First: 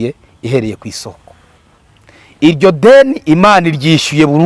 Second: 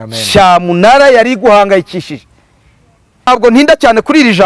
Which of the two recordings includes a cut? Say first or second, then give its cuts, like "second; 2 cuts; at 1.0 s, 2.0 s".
second; 1 cut; at 3.3 s